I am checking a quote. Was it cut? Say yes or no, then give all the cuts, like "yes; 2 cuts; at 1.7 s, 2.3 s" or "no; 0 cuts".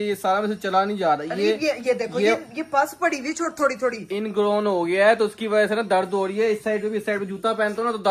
no; 0 cuts